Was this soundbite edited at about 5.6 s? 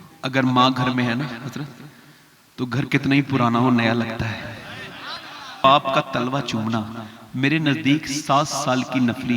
yes; 1 cut; at 5.6 s

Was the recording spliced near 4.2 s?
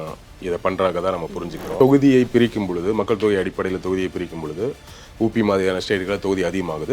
no; 1 cut; at 1.6 s

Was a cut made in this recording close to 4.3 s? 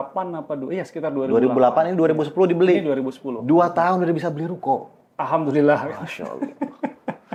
no; 0 cuts

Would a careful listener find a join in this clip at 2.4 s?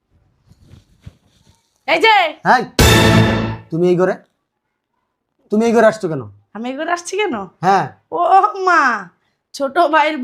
yes; 2 cuts; at 2.4 s, 3.6 s

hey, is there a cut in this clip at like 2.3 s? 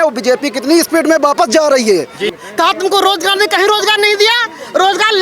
yes; 1 cut; at 2.3 s

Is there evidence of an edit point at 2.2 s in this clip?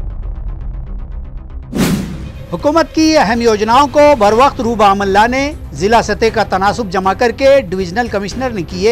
yes; 1 cut; at 2.2 s

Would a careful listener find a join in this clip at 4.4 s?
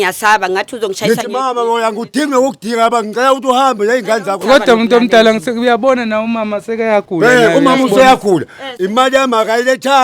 yes; 1 cut; at 4.4 s

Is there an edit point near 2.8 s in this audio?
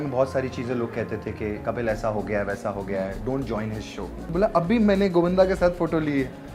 no; 1 cut; at 4.2 s

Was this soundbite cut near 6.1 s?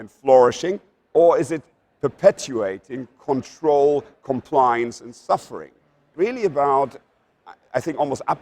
yes; 1 cut; at 6.1 s

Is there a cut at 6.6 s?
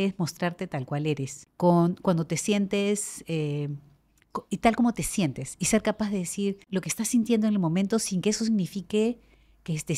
yes; 2 cuts; at 1.4 s, 6.6 s

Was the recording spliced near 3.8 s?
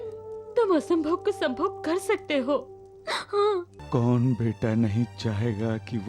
yes; 1 cut; at 3.8 s

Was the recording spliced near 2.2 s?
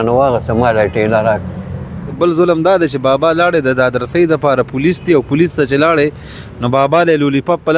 yes; 1 cut; at 2.2 s

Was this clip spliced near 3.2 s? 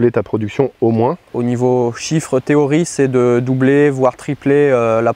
no; 1 cut; at 1.3 s

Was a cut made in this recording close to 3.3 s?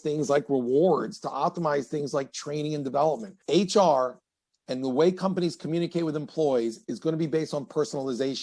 yes; 1 cut; at 3.3 s

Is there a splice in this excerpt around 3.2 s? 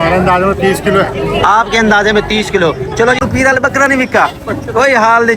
yes; 1 cut; at 3.2 s

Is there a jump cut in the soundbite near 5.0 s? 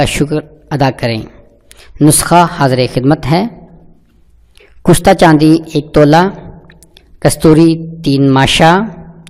yes; 1 cut; at 5.0 s

